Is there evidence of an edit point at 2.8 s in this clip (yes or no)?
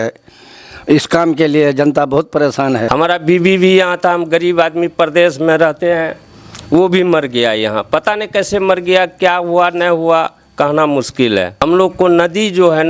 yes